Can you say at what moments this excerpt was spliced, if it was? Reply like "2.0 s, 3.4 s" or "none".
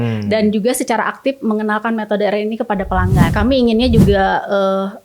3.2 s